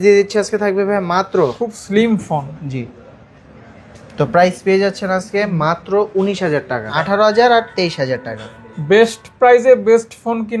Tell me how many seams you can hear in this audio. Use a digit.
2